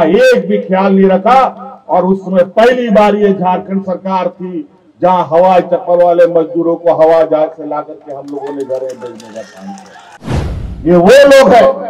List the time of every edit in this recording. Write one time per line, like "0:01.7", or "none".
0:10.1